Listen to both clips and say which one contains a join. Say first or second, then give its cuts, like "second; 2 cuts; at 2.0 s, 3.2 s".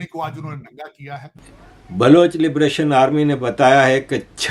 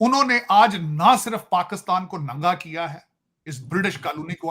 first; 1 cut; at 1.4 s